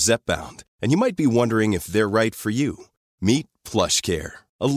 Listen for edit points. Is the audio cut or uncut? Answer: uncut